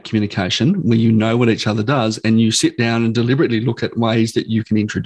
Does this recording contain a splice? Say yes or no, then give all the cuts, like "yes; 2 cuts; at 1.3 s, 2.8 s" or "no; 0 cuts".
no; 0 cuts